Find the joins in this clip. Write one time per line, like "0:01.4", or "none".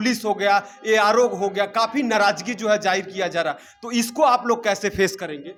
none